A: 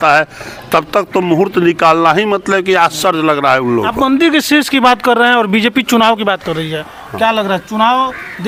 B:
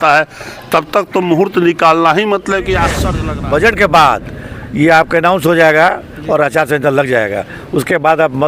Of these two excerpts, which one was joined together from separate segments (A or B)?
B